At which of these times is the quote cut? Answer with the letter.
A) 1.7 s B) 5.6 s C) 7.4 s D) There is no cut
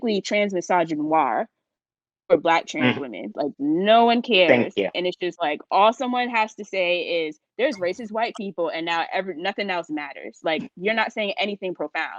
D